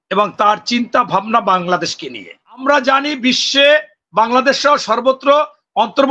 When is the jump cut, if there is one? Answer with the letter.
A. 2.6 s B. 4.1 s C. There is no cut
A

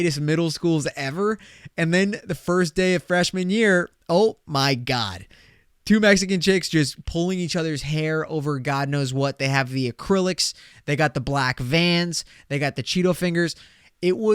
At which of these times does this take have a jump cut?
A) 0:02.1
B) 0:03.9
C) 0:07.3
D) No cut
D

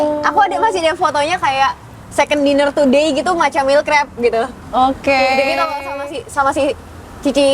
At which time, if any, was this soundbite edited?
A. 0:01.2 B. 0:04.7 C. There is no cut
C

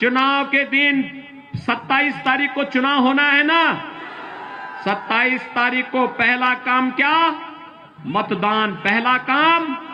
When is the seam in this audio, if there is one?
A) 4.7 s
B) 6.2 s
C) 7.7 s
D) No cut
D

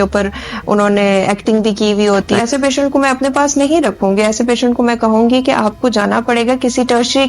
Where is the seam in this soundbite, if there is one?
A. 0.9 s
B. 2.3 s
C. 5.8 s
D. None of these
B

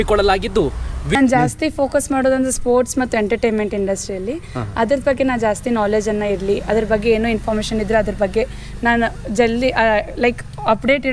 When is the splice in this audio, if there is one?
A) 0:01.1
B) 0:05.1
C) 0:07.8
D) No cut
A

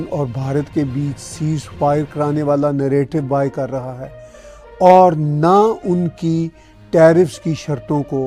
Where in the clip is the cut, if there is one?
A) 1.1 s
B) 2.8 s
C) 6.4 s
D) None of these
D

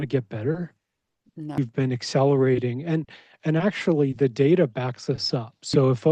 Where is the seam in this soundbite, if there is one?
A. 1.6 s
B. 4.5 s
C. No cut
A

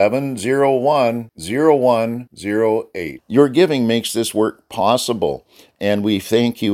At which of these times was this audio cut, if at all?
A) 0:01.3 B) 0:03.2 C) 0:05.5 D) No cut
D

